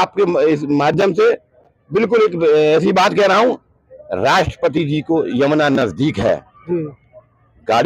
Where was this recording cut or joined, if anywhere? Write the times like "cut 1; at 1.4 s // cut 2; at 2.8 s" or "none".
none